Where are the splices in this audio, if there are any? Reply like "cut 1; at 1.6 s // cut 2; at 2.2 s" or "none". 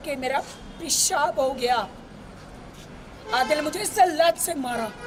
none